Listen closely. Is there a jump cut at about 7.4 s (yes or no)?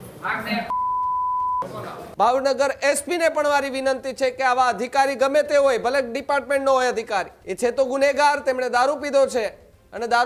yes